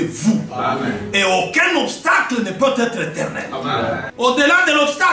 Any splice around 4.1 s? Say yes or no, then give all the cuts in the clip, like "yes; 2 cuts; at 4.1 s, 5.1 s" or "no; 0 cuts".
yes; 1 cut; at 4.1 s